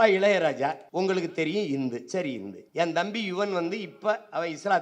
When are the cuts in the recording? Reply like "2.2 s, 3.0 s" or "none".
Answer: 0.8 s, 2.5 s